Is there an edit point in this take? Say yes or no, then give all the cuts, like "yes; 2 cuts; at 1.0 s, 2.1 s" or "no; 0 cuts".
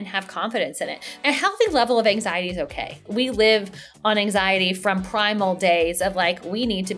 yes; 2 cuts; at 1.2 s, 3.1 s